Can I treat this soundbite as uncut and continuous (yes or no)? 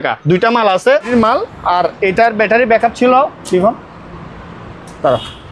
no